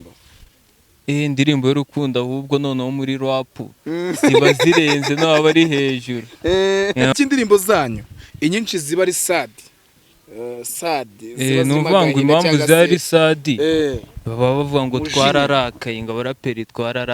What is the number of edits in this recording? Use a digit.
1